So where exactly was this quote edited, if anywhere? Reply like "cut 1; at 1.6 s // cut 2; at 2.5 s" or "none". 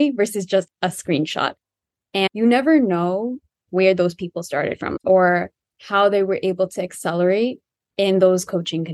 cut 1; at 2.3 s // cut 2; at 3.6 s // cut 3; at 4.9 s